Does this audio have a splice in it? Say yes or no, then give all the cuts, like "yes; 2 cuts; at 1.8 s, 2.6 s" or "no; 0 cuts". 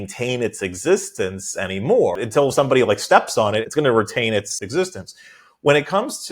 yes; 3 cuts; at 2.2 s, 3.6 s, 4.6 s